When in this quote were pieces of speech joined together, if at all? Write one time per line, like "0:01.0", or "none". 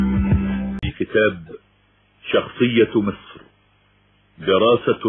0:00.9